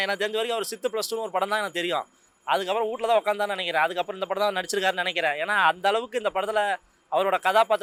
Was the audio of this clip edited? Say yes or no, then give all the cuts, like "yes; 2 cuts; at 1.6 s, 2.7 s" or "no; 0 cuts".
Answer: no; 0 cuts